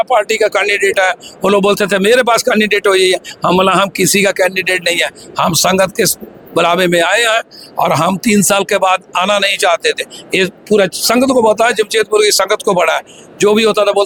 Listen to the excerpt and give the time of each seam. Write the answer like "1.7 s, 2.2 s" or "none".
none